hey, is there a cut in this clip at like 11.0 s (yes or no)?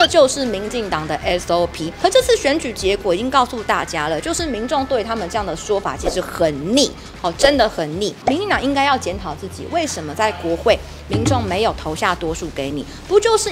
no